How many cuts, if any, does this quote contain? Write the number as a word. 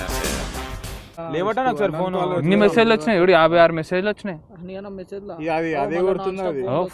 one